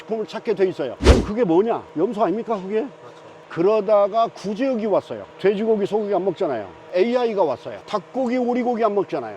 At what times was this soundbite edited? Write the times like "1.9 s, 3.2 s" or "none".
3.3 s, 6.9 s